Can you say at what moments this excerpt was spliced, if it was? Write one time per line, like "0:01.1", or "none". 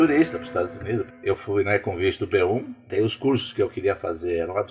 0:01.1
0:02.9